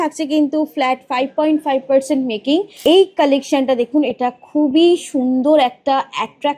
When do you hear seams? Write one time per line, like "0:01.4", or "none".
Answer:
0:02.7